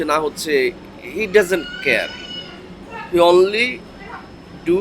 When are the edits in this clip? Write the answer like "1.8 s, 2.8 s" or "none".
none